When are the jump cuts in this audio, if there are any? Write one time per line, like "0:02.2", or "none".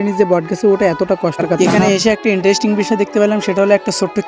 0:01.6